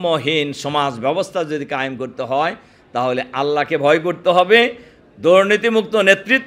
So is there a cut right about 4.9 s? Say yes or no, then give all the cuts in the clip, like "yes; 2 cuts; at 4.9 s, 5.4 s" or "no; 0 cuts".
no; 0 cuts